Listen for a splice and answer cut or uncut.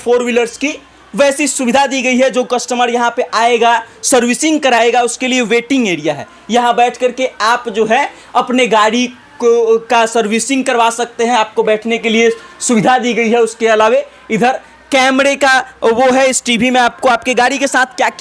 uncut